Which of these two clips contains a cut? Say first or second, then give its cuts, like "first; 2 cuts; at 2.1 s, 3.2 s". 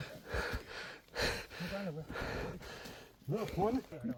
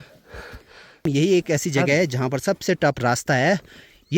second; 1 cut; at 1.1 s